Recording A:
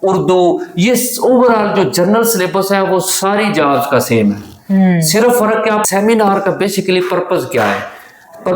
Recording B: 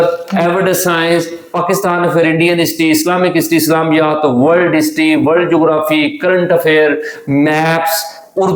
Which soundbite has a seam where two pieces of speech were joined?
A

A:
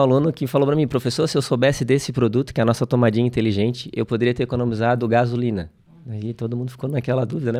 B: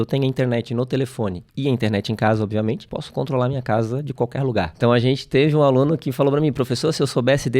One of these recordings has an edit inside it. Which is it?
B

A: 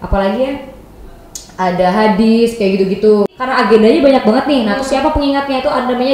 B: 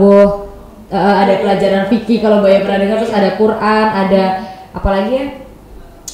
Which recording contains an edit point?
A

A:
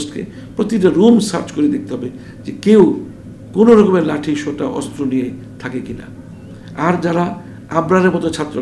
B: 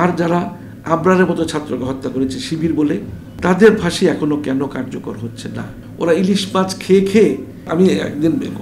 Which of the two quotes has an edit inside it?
B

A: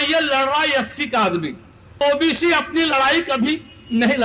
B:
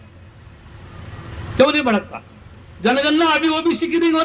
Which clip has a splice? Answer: A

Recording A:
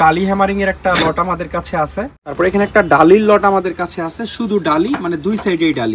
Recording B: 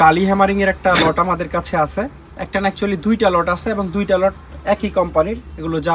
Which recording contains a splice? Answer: A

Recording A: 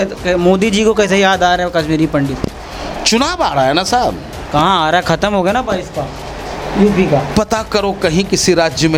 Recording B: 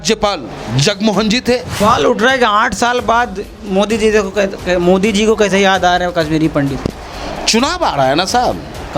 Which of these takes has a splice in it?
B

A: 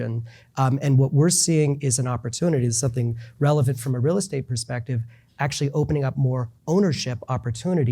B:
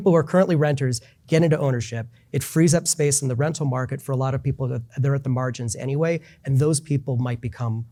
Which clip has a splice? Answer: A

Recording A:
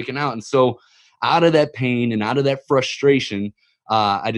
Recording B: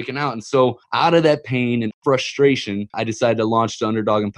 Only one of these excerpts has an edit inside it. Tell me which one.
B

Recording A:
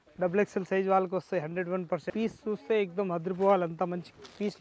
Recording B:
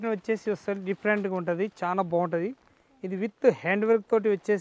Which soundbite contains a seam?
A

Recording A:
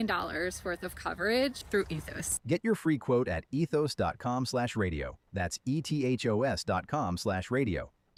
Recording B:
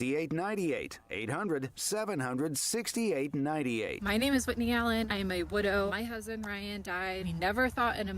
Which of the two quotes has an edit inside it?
B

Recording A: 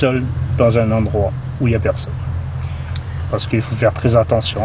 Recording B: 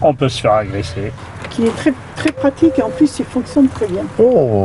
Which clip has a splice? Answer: B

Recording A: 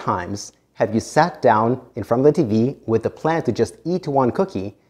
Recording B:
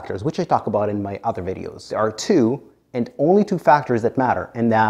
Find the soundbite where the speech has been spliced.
B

